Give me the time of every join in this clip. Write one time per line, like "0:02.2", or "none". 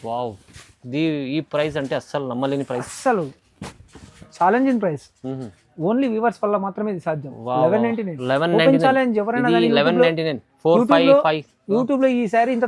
none